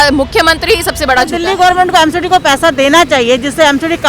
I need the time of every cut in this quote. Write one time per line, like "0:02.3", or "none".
0:01.3